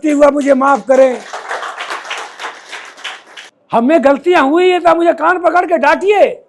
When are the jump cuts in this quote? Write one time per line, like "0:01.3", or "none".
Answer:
0:03.3